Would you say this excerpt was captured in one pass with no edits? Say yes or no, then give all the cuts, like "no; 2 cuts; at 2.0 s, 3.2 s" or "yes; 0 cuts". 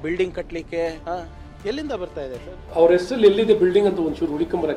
yes; 0 cuts